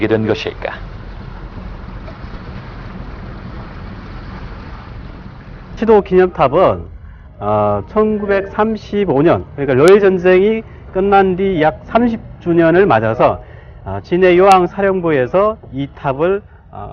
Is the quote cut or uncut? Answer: cut